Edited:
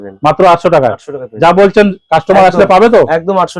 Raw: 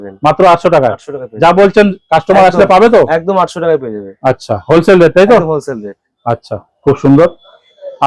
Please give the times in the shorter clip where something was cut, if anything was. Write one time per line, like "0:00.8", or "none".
none